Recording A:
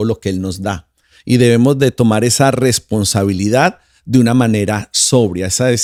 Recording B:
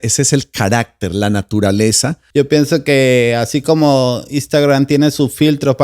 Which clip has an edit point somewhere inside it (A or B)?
B